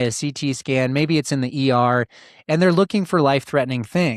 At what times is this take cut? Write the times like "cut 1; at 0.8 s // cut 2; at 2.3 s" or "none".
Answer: none